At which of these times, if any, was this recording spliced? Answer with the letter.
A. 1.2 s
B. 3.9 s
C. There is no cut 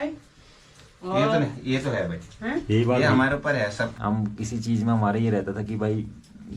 B